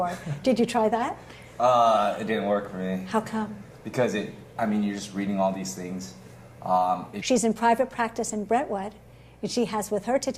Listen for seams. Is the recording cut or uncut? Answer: uncut